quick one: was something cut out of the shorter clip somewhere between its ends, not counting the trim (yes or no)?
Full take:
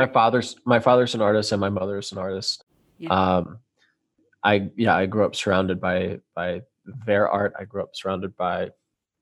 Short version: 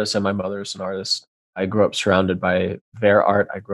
yes